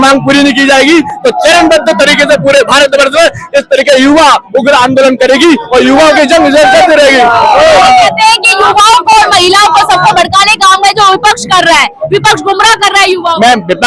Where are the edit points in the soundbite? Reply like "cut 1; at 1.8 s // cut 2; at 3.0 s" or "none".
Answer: none